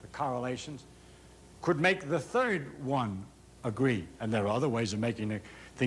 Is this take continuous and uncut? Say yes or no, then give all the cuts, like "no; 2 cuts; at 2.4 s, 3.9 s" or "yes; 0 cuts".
yes; 0 cuts